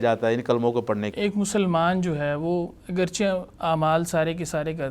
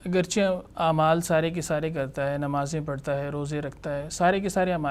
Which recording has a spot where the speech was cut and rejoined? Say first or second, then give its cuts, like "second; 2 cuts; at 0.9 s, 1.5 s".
first; 1 cut; at 1.1 s